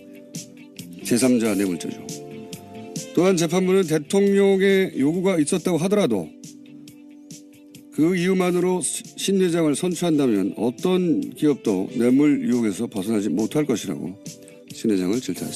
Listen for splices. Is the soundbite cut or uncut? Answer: uncut